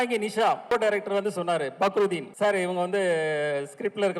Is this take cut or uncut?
cut